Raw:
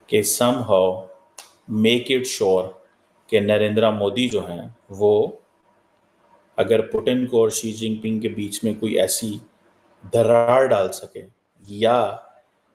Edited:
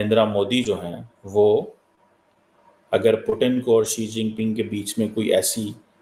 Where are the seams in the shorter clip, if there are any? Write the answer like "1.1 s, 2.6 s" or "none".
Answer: none